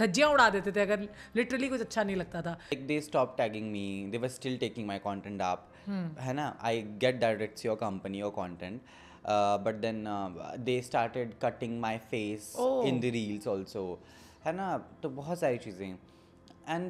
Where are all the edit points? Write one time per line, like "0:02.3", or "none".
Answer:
0:02.8

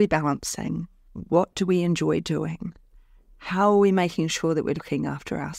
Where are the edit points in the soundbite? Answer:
none

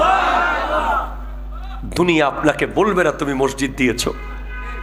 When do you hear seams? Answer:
none

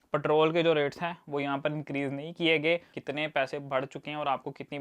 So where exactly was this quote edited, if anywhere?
0:02.9

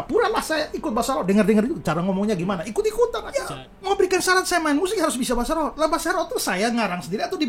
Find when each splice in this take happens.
0:03.2

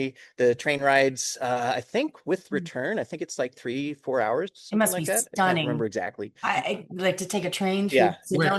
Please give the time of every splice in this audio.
none

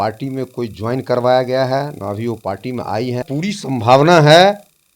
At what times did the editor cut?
0:03.3

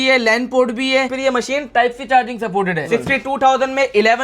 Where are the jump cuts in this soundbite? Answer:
0:01.1
0:02.9

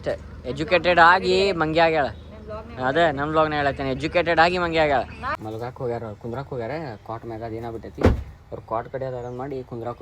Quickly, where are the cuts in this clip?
0:05.2

